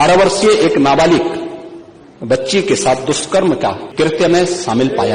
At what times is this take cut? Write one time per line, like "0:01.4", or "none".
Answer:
0:03.8